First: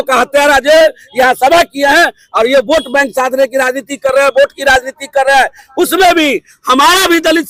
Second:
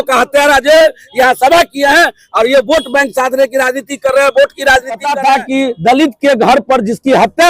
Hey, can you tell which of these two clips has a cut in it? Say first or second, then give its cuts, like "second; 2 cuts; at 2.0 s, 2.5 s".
second; 1 cut; at 5.1 s